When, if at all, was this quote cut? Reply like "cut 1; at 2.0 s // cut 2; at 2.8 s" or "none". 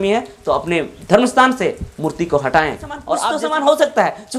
cut 1; at 3.0 s